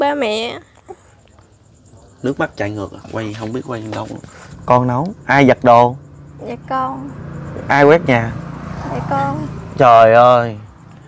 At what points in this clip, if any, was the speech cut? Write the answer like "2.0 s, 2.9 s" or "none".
4.5 s